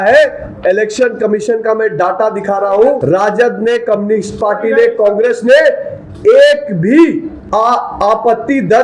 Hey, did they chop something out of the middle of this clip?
yes; 2 cuts; at 3.0 s, 7.4 s

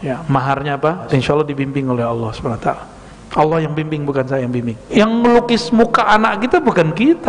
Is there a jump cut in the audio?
yes; 2 cuts; at 1.1 s, 4.8 s

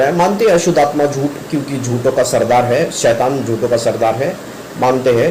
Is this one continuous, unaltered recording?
yes; 0 cuts

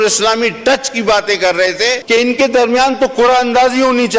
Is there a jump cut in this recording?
yes; 1 cut; at 2.0 s

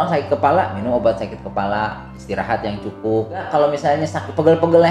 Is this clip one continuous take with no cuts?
no; 1 cut; at 3.5 s

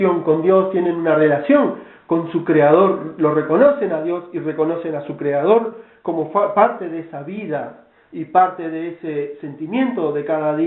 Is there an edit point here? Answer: yes; 1 cut; at 8.8 s

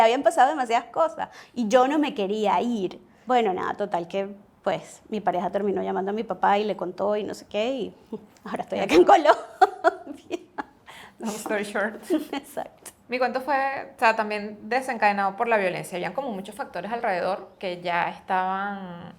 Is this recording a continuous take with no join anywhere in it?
yes; 0 cuts

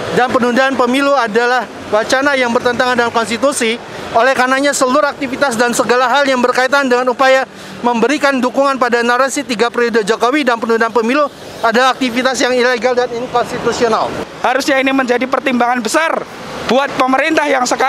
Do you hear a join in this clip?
yes; 1 cut; at 14.2 s

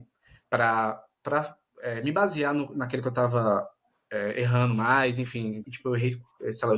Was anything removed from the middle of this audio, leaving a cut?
yes; 1 cut; at 5.6 s

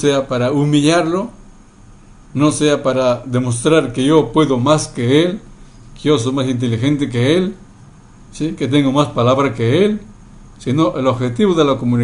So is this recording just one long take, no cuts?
yes; 0 cuts

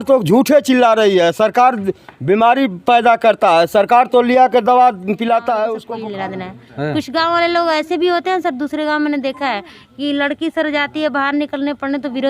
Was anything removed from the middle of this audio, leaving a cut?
yes; 1 cut; at 5.8 s

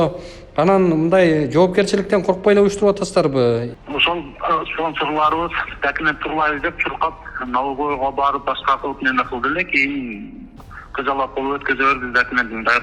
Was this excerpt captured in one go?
no; 1 cut; at 3.7 s

